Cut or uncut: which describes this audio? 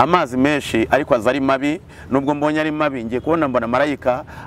uncut